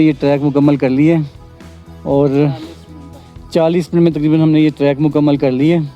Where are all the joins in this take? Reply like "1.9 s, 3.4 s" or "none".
none